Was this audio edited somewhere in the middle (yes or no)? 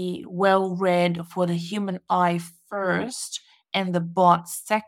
no